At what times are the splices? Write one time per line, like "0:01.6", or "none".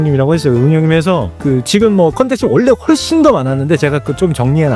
none

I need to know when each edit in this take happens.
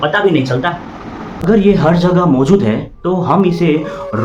0:01.4

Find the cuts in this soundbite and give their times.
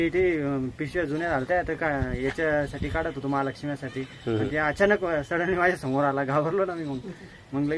none

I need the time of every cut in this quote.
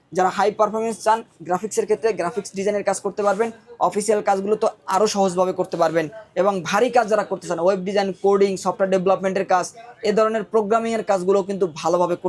none

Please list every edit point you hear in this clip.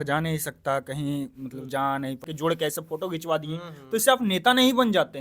0:02.2

